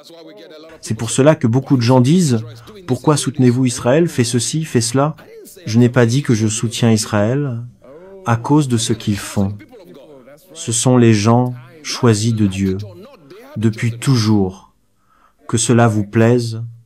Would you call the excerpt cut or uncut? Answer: uncut